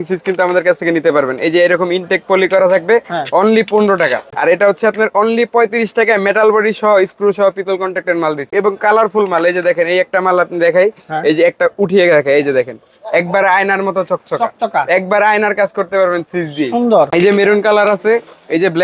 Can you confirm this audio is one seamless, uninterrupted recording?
no; 3 cuts; at 4.3 s, 8.5 s, 17.1 s

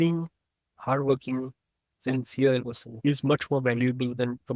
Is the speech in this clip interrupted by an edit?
no; 0 cuts

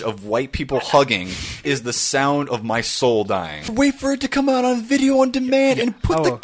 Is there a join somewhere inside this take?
yes; 2 cuts; at 1.6 s, 3.7 s

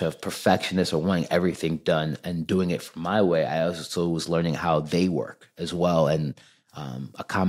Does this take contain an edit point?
no; 0 cuts

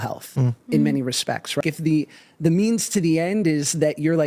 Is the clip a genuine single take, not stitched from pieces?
no; 1 cut; at 1.6 s

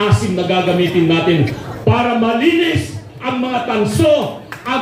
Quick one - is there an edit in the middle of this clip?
no; 0 cuts

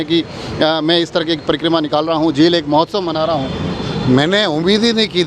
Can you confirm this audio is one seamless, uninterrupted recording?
yes; 0 cuts

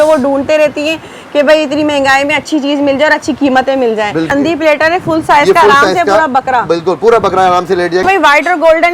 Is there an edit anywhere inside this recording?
yes; 2 cuts; at 4.3 s, 8.0 s

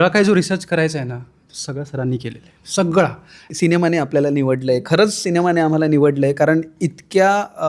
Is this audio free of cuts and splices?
no; 1 cut; at 3.5 s

